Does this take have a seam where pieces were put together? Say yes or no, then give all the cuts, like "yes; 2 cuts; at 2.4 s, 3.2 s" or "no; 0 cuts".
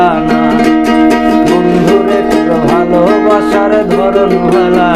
no; 0 cuts